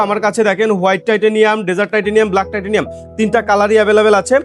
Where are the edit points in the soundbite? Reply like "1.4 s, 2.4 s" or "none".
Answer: none